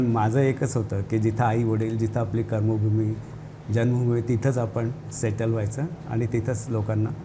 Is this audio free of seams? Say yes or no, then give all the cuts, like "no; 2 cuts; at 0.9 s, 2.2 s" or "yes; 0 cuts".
yes; 0 cuts